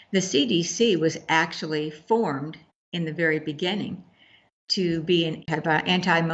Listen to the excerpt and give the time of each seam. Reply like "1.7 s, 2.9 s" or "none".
5.4 s